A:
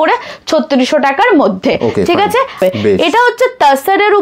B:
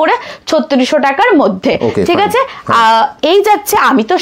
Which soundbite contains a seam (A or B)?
A